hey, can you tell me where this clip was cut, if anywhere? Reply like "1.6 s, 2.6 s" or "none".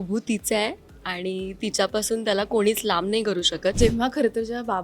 3.8 s